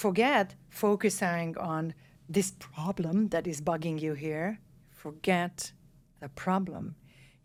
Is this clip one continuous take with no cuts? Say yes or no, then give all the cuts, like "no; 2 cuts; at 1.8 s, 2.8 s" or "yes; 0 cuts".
yes; 0 cuts